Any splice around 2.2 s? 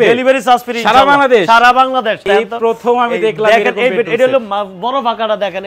yes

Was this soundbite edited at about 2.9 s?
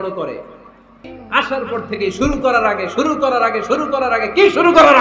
no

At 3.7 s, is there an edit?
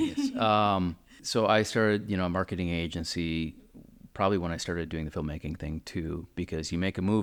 no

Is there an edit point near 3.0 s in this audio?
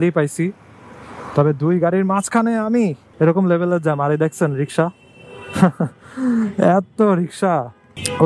yes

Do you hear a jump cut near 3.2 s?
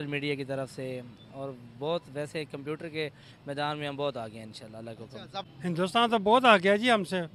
no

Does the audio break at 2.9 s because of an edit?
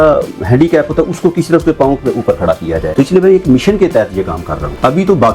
yes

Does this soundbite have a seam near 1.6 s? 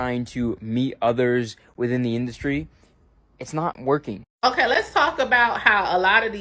no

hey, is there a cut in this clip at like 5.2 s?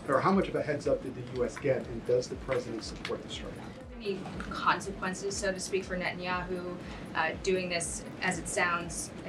no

